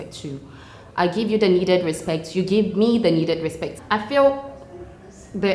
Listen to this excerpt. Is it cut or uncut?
cut